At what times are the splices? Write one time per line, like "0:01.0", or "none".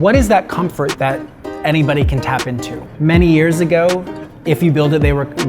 0:02.8